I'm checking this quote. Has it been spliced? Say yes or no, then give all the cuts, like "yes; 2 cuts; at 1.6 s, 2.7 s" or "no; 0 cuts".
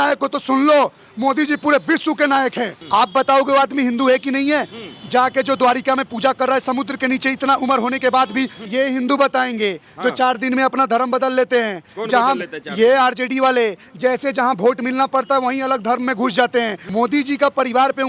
yes; 3 cuts; at 2.8 s, 8.6 s, 16.8 s